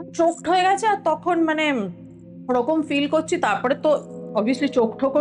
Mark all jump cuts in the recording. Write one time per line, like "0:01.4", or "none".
none